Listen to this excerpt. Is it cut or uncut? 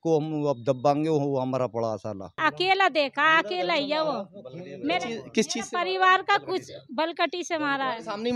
cut